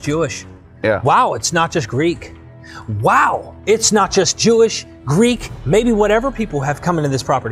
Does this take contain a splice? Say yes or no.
no